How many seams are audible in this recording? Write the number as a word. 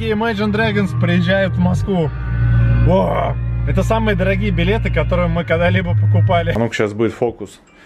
one